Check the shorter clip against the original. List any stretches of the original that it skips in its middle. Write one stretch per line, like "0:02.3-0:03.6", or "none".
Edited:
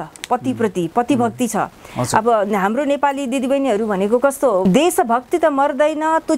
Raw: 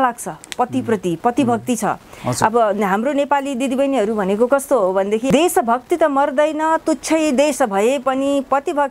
0:04.9-0:05.2